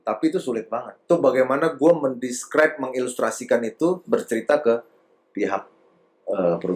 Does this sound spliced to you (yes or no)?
no